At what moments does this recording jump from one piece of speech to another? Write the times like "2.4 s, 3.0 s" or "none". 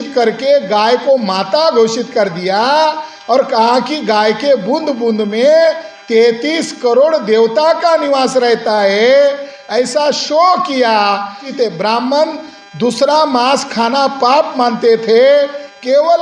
11.4 s